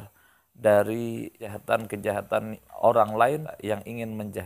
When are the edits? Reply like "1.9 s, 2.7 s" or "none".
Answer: 1.5 s, 3.5 s